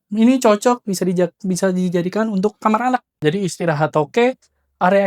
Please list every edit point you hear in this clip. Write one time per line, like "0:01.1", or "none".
0:03.2